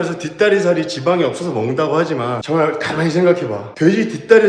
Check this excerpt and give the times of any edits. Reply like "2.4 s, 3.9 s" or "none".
2.4 s